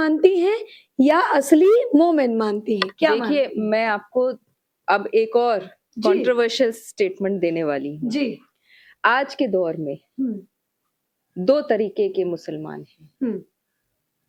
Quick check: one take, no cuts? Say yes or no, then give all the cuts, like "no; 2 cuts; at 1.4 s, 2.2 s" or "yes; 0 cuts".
yes; 0 cuts